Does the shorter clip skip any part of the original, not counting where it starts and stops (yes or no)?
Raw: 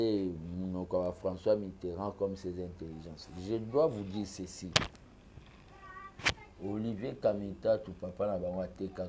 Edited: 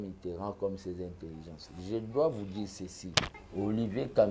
yes